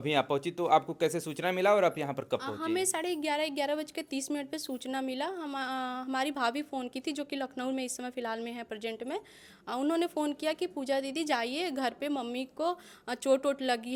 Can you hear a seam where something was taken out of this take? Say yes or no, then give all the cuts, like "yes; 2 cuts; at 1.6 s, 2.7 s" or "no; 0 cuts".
no; 0 cuts